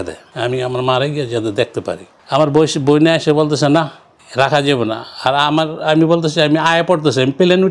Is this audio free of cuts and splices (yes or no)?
yes